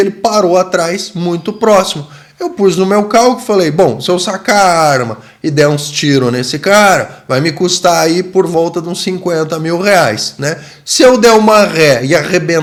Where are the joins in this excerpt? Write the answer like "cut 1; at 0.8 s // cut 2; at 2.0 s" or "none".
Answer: none